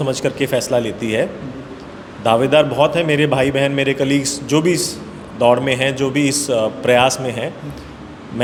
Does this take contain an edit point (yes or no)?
no